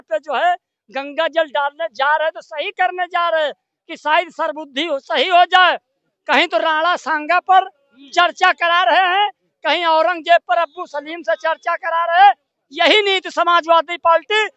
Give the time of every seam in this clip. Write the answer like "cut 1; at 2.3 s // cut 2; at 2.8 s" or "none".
none